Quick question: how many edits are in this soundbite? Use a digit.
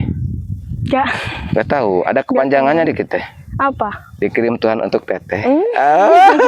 0